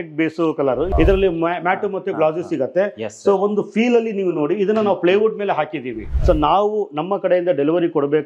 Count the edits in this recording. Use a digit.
2